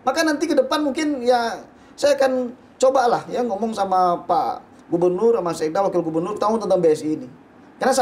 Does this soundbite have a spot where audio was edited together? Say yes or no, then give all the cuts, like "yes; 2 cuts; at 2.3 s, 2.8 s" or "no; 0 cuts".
no; 0 cuts